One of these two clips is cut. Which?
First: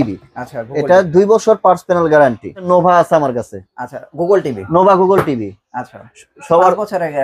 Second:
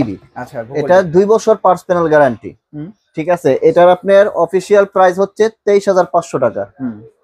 first; 1 cut; at 2.6 s

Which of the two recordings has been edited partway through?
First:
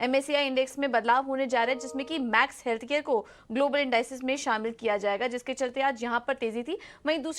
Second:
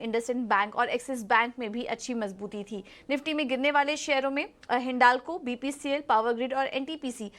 second; 1 cut; at 5.4 s

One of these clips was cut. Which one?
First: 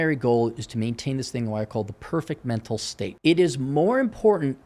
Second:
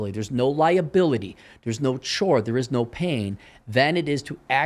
first; 1 cut; at 3.0 s

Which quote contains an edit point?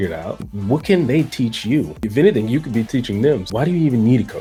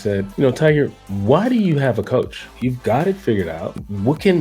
second; 1 cut; at 2.4 s

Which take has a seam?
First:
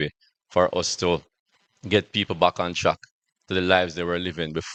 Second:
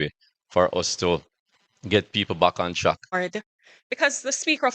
second; 1 cut; at 3.1 s

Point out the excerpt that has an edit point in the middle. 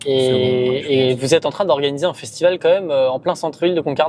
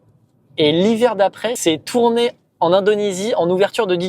second; 1 cut; at 1.5 s

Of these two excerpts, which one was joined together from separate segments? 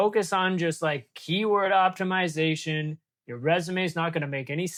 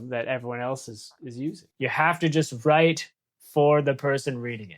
second; 1 cut; at 1.7 s

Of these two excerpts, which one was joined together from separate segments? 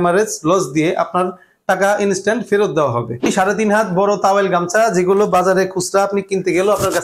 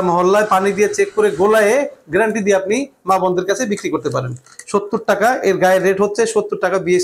first; 1 cut; at 3.3 s

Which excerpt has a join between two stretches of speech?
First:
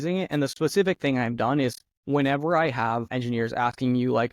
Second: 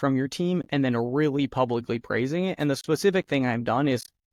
first; 1 cut; at 3.1 s

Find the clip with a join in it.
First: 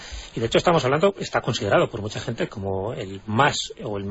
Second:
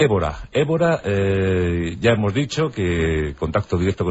second; 1 cut; at 2.6 s

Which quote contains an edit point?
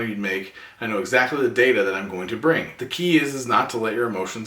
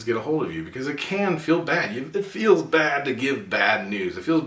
first; 1 cut; at 2.8 s

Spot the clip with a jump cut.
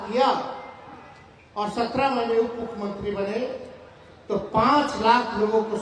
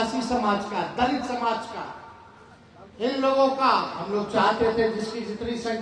second; 1 cut; at 4.0 s

